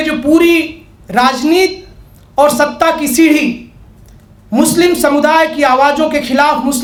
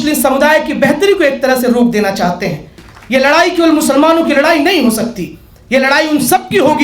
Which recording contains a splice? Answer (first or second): second